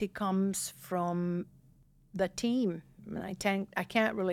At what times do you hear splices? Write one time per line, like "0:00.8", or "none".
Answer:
none